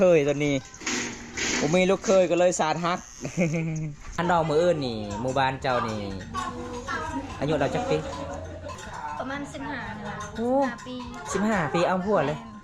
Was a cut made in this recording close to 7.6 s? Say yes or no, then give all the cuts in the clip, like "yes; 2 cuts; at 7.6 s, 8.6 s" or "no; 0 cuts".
no; 2 cuts; at 4.2 s, 8.8 s